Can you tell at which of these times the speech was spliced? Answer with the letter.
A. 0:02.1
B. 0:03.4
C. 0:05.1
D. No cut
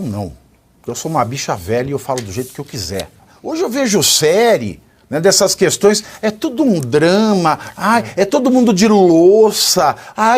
B